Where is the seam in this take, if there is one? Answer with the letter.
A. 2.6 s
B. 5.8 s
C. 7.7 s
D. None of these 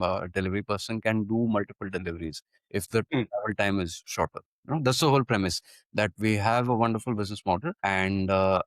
C